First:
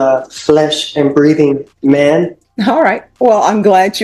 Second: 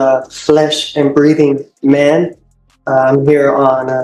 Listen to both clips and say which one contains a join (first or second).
first